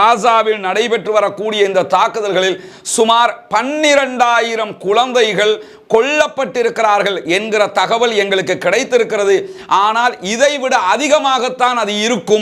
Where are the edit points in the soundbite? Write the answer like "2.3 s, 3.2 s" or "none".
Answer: none